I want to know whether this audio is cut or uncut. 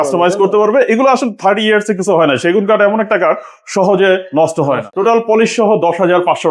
cut